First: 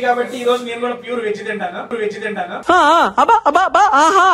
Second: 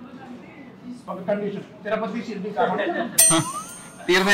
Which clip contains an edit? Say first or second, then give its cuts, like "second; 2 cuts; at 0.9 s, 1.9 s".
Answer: second; 1 cut; at 1.0 s